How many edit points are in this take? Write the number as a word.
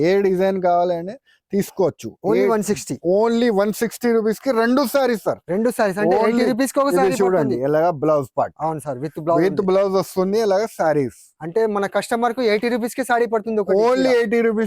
zero